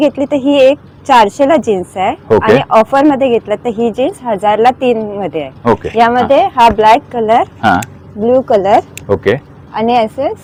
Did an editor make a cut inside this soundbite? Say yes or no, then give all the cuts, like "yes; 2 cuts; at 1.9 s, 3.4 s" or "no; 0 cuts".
no; 0 cuts